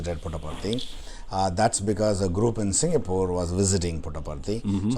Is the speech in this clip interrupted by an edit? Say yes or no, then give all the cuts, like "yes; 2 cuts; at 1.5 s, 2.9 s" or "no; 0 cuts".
no; 0 cuts